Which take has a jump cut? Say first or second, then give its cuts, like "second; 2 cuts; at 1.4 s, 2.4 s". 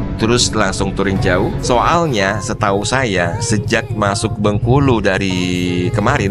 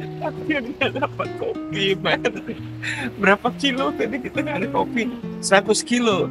first; 1 cut; at 1.6 s